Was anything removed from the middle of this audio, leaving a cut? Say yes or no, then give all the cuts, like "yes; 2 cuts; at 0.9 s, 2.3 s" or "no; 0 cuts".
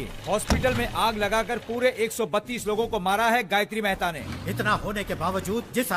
yes; 1 cut; at 4.2 s